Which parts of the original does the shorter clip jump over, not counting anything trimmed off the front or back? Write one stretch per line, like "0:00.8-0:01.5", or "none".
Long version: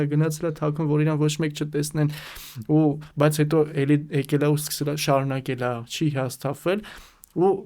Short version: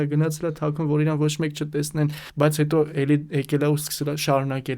0:02.2-0:03.0